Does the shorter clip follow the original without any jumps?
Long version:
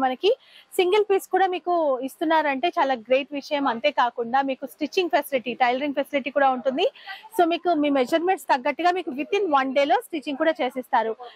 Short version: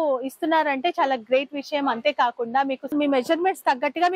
no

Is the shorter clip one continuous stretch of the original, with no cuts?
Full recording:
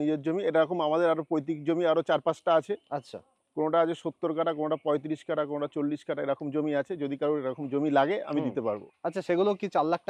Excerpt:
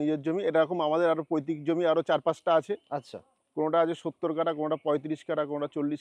yes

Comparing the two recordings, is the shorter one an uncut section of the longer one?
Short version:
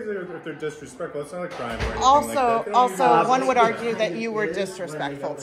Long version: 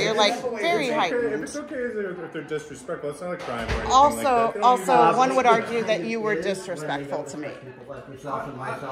yes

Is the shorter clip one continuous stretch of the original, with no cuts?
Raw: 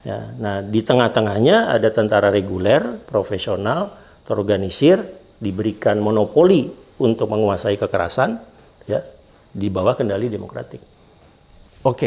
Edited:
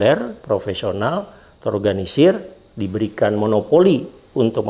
yes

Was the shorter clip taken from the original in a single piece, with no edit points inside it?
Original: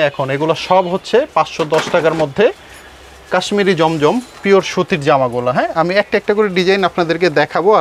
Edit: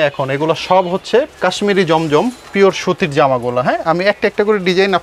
no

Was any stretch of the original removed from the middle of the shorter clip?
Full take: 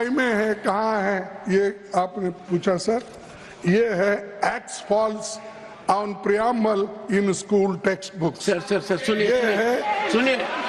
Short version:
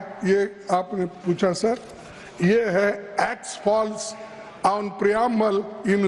no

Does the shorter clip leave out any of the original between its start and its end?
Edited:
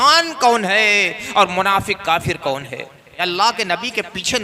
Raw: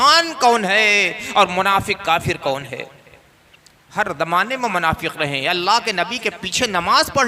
yes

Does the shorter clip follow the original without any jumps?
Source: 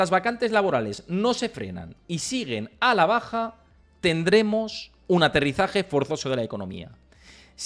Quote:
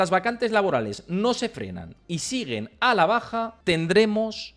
no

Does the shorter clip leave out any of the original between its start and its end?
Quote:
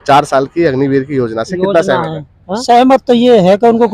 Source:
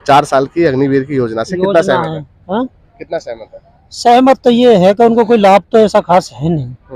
yes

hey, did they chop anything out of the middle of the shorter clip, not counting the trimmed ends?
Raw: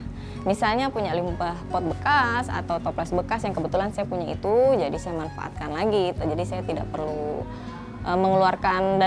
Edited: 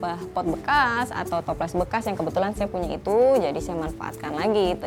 no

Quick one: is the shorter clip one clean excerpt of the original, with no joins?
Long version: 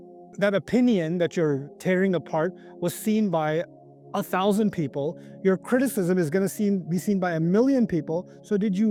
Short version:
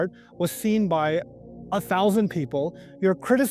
yes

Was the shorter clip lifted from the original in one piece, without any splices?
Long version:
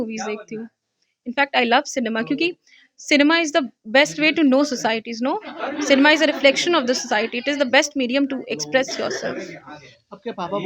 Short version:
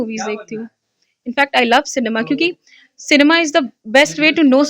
yes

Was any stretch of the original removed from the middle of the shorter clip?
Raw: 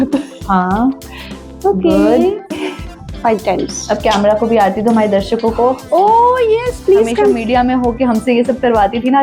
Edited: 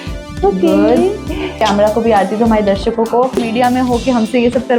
yes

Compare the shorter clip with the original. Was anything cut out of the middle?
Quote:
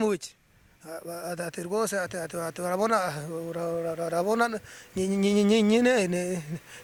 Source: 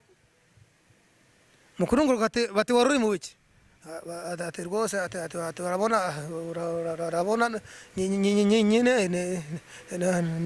no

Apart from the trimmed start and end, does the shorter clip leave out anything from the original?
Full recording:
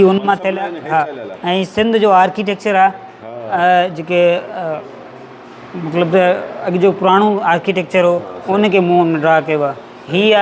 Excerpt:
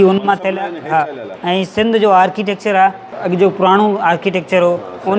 yes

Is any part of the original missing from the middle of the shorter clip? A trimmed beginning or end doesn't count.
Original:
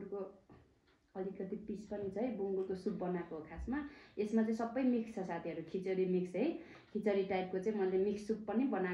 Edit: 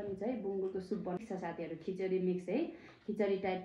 yes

